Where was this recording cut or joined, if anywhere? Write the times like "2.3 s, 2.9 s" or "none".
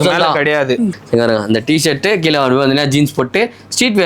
1.0 s